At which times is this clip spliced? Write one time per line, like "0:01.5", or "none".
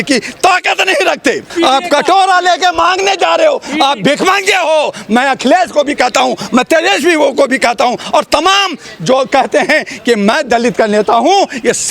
0:01.5